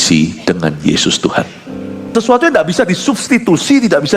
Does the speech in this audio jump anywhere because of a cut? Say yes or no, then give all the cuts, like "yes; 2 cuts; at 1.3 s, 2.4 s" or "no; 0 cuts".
yes; 1 cut; at 2.1 s